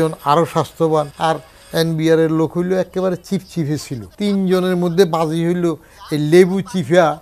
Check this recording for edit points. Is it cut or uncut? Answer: cut